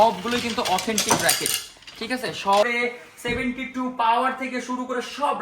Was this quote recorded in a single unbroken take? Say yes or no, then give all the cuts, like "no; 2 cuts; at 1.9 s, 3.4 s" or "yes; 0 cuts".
no; 1 cut; at 2.6 s